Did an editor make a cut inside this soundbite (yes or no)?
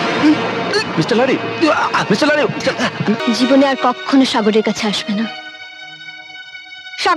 yes